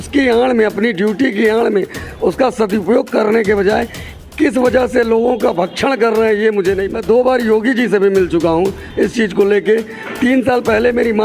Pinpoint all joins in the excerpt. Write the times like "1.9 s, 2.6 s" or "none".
6.9 s